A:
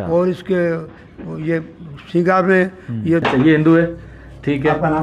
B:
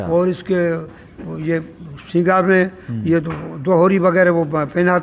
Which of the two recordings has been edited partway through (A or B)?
A